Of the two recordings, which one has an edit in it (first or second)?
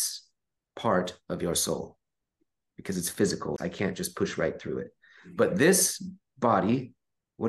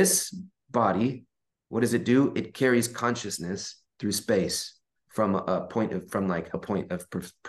first